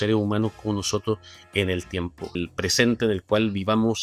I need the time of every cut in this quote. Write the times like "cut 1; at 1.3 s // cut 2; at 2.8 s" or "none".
cut 1; at 2.4 s